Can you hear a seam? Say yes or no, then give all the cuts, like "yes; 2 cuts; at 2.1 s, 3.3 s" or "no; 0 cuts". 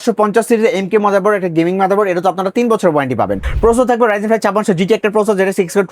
yes; 1 cut; at 3.4 s